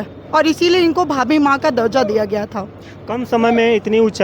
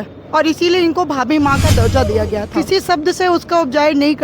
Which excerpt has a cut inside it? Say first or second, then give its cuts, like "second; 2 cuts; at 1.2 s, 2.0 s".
second; 1 cut; at 2.5 s